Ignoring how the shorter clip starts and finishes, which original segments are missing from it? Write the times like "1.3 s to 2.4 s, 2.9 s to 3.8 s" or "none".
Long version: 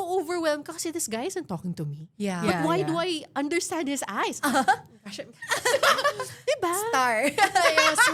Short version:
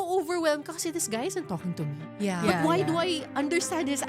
none